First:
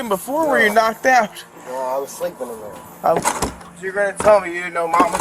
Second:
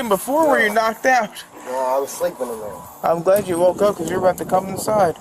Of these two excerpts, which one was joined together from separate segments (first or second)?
first